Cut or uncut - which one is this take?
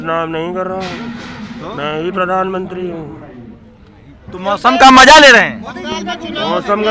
uncut